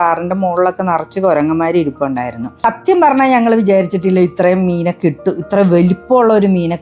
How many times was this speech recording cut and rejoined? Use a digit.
1